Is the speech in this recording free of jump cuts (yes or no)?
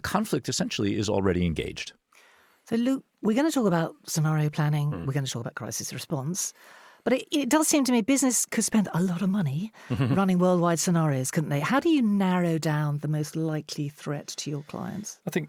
yes